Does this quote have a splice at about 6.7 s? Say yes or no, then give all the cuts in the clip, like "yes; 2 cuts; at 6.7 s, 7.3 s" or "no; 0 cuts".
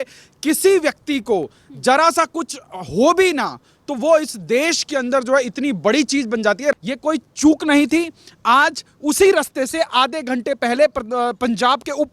yes; 1 cut; at 6.7 s